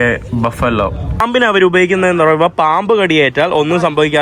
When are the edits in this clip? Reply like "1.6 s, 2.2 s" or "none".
1.2 s